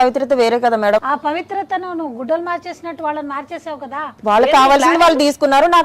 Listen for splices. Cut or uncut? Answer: cut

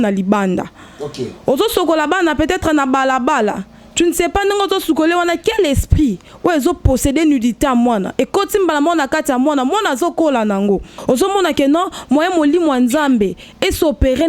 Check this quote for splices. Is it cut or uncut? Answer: cut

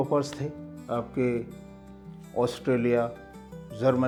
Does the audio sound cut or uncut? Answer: uncut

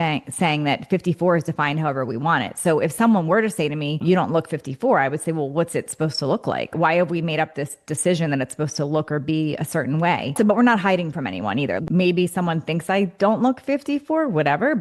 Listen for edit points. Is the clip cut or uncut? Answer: cut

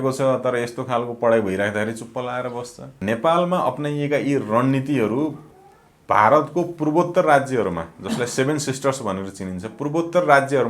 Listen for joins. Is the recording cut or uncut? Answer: cut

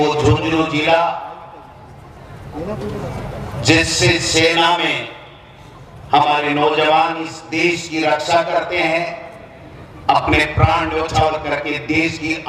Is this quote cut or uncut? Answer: uncut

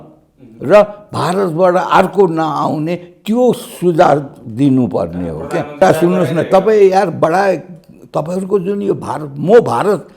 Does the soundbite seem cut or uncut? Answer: cut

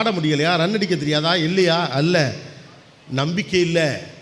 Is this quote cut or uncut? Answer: uncut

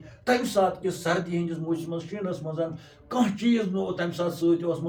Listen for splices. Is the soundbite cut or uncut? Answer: uncut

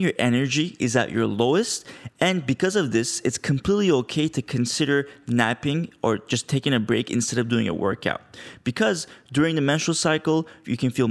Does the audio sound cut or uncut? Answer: uncut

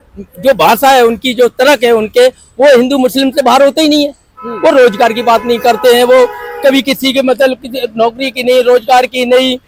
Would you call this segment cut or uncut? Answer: uncut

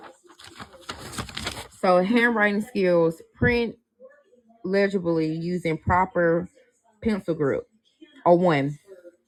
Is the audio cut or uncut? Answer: uncut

